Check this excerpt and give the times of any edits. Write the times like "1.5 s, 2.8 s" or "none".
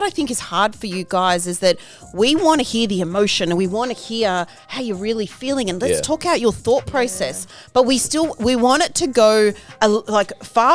none